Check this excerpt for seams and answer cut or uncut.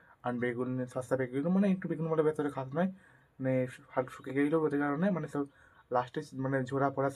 uncut